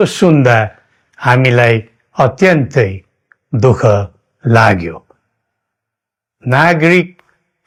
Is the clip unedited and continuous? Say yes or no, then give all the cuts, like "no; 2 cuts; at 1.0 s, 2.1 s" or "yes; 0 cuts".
yes; 0 cuts